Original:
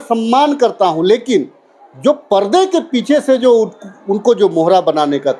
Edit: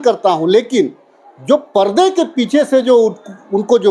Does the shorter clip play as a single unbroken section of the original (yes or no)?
yes